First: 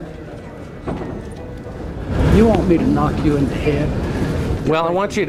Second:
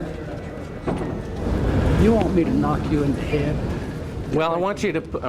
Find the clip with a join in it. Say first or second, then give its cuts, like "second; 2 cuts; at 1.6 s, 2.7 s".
second; 1 cut; at 1.4 s